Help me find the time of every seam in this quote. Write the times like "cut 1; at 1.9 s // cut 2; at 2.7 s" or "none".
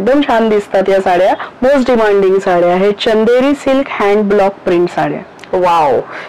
cut 1; at 1.5 s